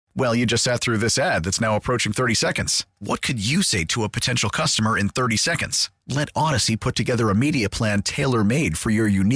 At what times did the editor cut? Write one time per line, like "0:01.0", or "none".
none